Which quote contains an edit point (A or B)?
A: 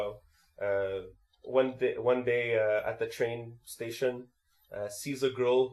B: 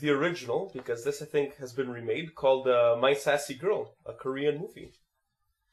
B